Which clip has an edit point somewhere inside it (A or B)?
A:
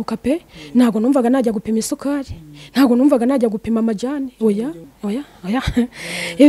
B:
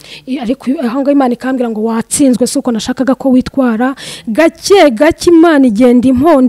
A